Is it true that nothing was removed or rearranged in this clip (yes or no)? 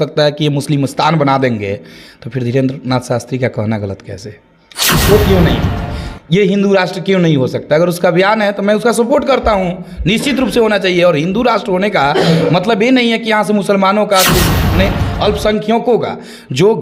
yes